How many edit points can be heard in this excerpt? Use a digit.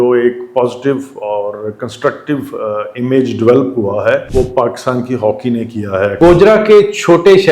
2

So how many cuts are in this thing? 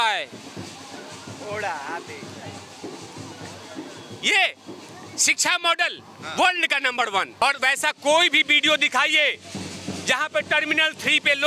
1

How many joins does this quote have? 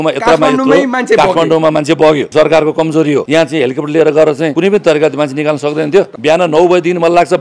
4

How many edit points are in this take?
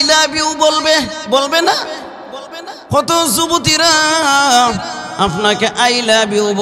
0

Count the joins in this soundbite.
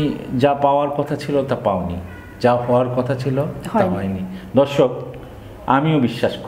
0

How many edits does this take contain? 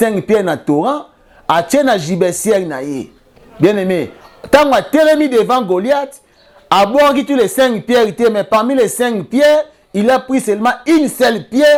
0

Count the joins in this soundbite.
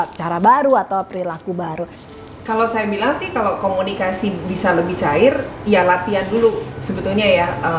1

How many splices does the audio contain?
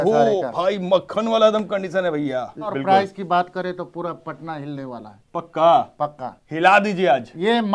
1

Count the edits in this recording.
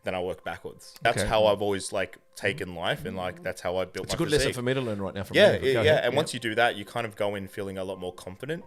1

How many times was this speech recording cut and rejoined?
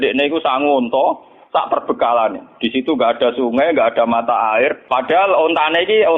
1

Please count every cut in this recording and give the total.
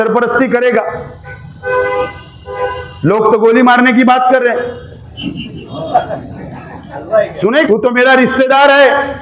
1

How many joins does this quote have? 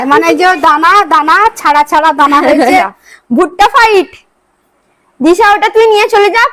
1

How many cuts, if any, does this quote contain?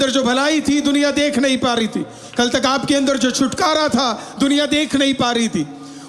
0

